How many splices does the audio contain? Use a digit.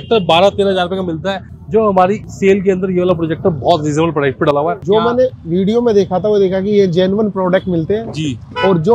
1